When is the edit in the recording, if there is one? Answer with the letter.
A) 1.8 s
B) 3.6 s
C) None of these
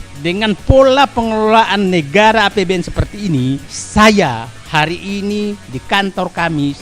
C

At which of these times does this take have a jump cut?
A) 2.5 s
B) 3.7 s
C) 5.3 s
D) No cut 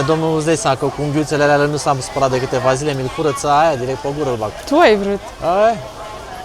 D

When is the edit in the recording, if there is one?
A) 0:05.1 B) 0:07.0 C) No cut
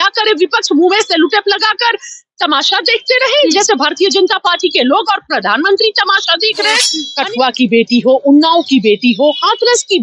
B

